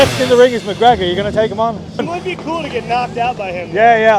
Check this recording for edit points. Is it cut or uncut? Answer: cut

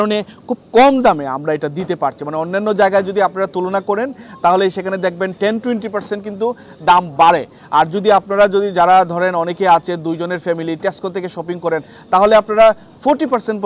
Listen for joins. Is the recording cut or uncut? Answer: uncut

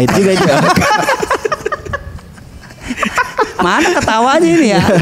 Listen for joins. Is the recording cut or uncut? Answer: uncut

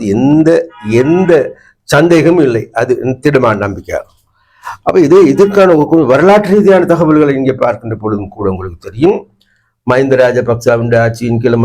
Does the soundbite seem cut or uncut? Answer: uncut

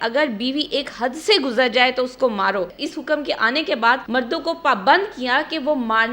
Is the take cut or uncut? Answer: cut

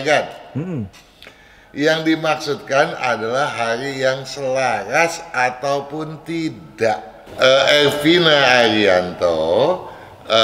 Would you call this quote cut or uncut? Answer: cut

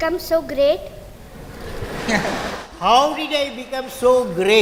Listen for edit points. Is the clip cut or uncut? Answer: uncut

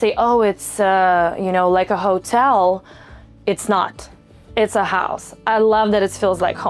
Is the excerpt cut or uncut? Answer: uncut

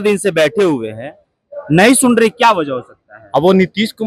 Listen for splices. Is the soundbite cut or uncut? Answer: uncut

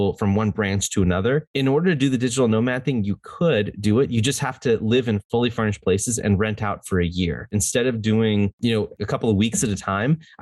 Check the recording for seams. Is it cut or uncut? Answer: cut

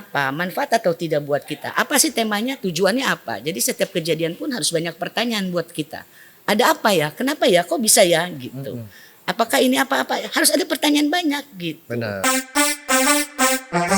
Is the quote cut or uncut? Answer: cut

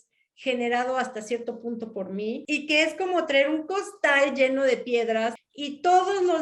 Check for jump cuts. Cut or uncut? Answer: cut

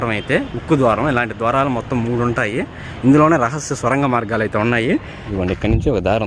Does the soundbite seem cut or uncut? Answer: cut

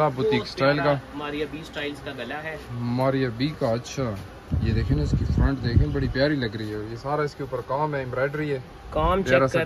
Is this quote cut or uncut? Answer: uncut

